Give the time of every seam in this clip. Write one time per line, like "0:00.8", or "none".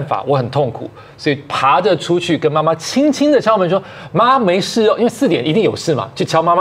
none